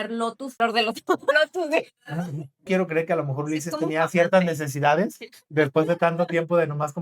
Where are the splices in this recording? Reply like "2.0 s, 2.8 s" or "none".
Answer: 2.7 s